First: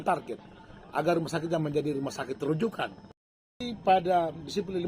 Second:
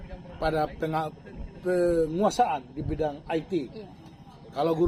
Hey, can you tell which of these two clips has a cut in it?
first; 1 cut; at 3.6 s

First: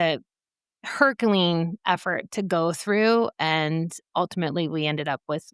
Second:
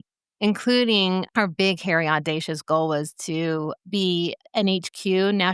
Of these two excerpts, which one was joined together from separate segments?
second; 1 cut; at 1.3 s

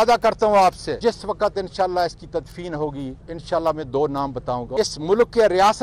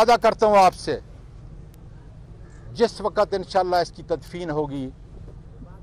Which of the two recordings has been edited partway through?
first; 3 cuts; at 1.0 s, 3.3 s, 4.7 s

